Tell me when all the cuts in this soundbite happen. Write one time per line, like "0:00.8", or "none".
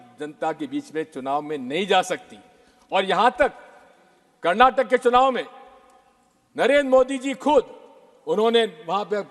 none